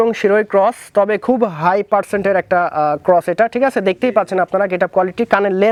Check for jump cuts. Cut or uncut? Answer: uncut